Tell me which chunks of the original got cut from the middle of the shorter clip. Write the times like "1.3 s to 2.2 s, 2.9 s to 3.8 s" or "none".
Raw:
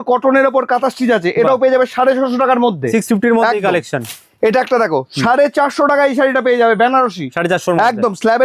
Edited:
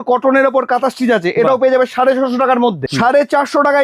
2.8 s to 5.1 s

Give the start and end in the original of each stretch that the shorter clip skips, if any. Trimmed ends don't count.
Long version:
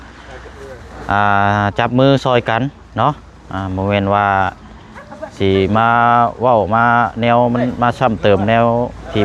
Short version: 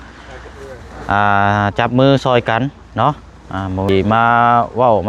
3.9 s to 5.5 s

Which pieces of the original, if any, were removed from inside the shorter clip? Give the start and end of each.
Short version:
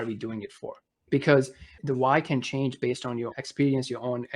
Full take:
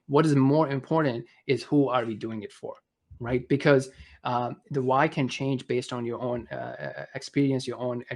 3.1 s to 3.4 s, 4.1 s to 4.6 s, 6.2 s to 7.1 s

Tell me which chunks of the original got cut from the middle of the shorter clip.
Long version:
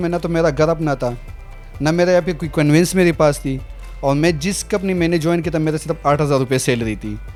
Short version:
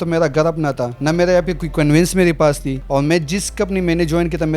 1.2 s to 1.7 s, 3.5 s to 3.9 s

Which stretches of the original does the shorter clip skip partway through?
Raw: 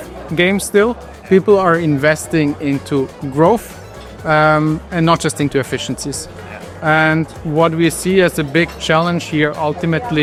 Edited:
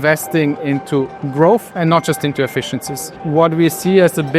3.7 s to 4.9 s, 6.3 s to 7.4 s

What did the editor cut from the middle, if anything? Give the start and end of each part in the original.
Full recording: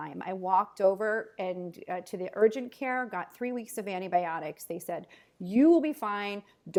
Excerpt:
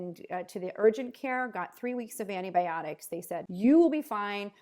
5.0 s to 5.3 s

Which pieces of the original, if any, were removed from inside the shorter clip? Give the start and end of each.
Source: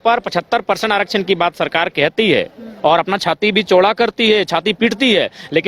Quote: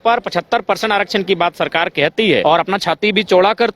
2.4 s to 2.8 s

